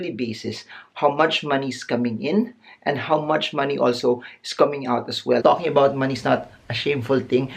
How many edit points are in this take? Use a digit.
1